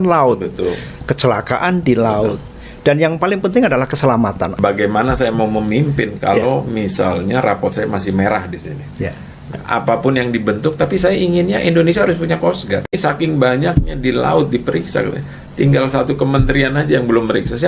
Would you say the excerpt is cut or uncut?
cut